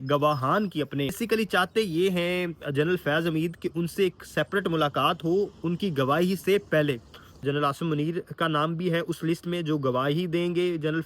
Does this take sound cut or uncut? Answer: cut